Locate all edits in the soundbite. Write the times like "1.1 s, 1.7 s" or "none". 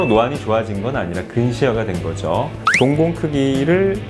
2.7 s